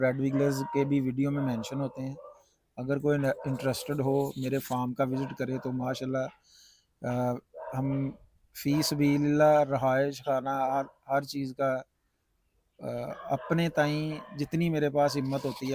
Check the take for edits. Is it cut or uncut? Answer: uncut